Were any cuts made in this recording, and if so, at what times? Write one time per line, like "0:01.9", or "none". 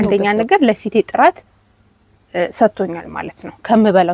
none